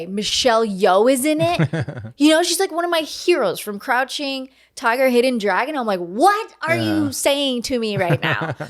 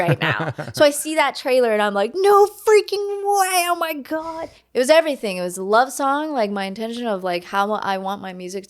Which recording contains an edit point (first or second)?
second